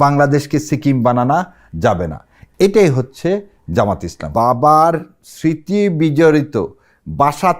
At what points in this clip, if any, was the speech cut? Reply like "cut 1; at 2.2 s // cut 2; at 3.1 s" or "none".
cut 1; at 4.2 s